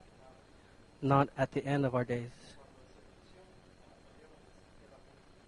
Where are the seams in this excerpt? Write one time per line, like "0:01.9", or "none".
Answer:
0:01.7